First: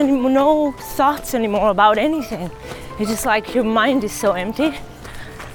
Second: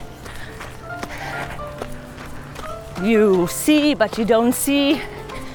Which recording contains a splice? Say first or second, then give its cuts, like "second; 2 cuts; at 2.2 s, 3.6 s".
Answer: second; 1 cut; at 2.8 s